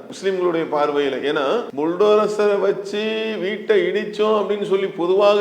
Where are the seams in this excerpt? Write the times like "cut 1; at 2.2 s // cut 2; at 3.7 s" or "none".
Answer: cut 1; at 1.7 s